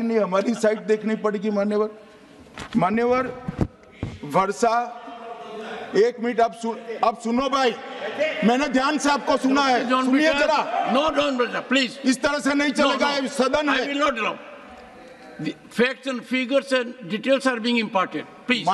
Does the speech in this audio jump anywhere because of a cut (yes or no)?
no